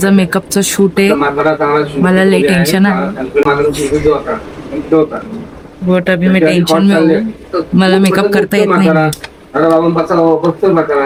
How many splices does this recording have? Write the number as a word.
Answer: zero